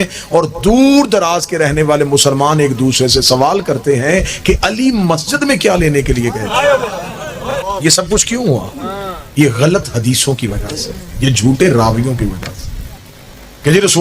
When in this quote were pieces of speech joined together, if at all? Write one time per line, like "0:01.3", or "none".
0:07.7